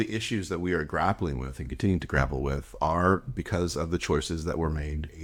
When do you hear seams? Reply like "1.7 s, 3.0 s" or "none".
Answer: none